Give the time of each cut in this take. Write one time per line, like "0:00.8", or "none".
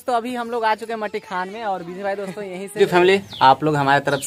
0:02.8

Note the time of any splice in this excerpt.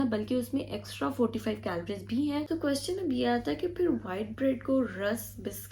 0:02.5

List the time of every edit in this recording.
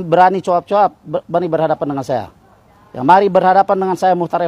none

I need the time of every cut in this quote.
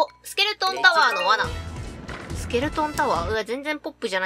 none

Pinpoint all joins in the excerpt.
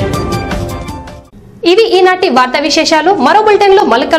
none

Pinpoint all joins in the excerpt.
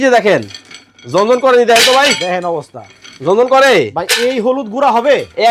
none

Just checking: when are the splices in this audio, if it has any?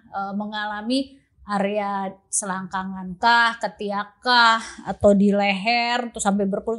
none

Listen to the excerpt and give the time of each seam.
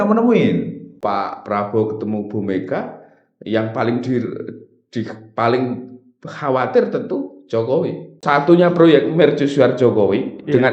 0:01.0
0:08.1

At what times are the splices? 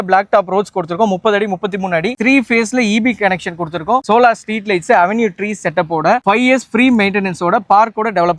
0:02.1

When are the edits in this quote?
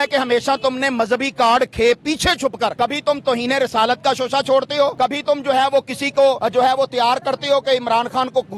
0:02.7
0:04.9
0:06.4

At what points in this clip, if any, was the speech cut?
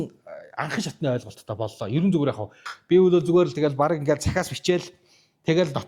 0:02.6

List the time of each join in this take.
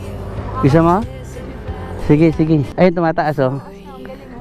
0:02.7

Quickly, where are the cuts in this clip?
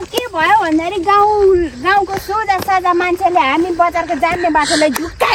none

